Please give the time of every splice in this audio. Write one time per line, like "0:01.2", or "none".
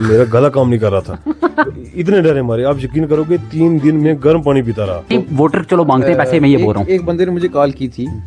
0:05.1